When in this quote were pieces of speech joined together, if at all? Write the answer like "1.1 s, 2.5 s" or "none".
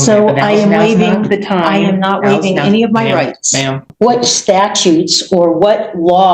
3.8 s